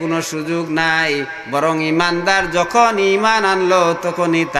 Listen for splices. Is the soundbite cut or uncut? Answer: uncut